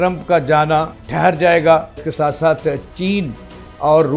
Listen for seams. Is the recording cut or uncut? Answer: cut